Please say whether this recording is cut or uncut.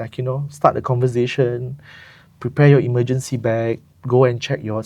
uncut